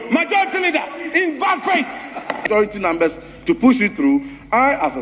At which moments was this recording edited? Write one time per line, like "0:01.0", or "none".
0:02.5